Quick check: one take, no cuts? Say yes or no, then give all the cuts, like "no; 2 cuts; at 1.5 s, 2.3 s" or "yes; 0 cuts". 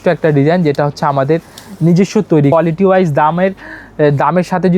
no; 1 cut; at 2.5 s